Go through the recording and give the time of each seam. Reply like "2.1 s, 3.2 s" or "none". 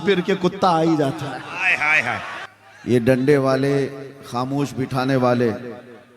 2.4 s